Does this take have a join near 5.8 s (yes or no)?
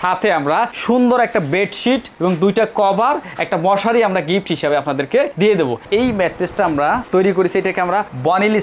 yes